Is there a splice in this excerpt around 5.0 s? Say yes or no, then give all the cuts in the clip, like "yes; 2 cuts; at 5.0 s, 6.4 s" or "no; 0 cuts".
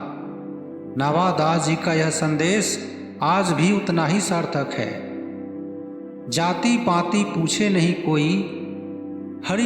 yes; 2 cuts; at 5.0 s, 6.3 s